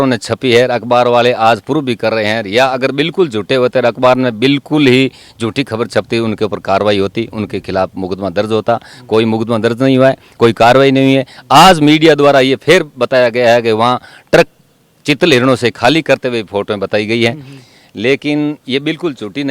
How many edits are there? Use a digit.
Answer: 0